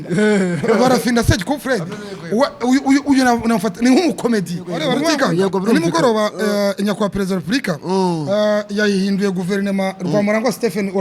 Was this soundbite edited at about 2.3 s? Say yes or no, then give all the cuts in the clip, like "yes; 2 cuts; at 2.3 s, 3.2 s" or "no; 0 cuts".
no; 1 cut; at 5.0 s